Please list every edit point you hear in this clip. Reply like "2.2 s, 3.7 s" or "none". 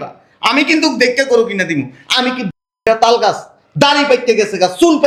none